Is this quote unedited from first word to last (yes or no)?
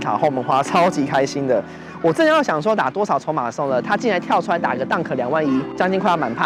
yes